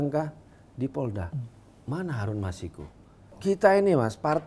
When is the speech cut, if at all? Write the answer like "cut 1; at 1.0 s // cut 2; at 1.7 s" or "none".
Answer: cut 1; at 3.3 s